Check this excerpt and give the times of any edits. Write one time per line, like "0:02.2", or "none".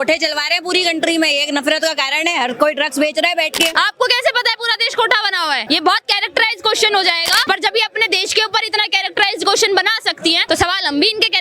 0:03.7
0:05.6
0:07.5
0:10.4